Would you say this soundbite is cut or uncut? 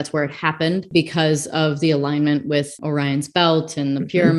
cut